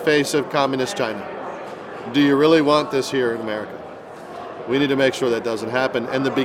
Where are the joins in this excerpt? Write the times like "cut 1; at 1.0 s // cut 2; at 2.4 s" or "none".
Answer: none